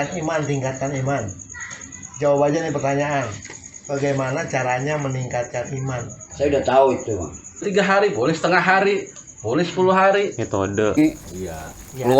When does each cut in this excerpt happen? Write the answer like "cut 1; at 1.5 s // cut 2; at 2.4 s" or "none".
cut 1; at 7.6 s // cut 2; at 11.0 s